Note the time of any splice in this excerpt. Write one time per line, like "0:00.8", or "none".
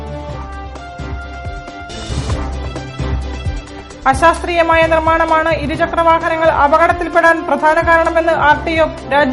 0:01.8